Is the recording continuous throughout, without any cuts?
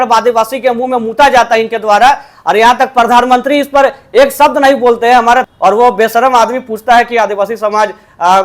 no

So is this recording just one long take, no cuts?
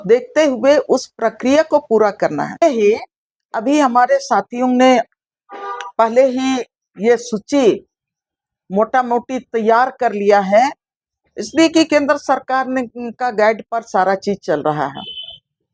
no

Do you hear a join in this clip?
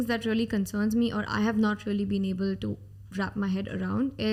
no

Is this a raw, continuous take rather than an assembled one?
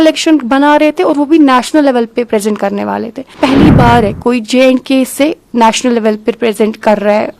no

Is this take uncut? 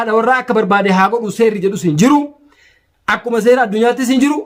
yes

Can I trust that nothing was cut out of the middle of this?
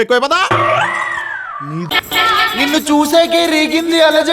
no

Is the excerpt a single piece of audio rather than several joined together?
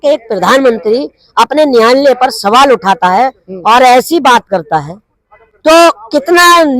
yes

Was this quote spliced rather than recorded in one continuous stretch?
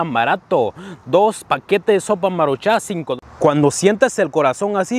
yes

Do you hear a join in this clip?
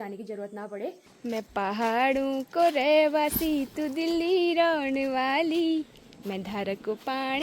yes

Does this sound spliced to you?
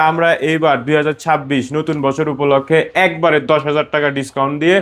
no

